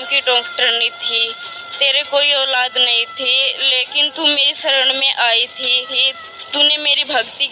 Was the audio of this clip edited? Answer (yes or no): yes